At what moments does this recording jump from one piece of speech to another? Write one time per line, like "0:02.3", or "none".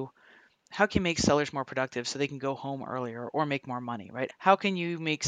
0:04.3